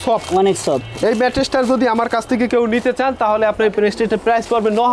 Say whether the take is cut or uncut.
uncut